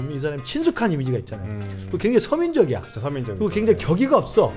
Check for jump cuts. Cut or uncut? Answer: uncut